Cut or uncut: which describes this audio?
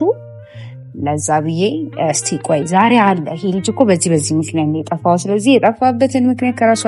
uncut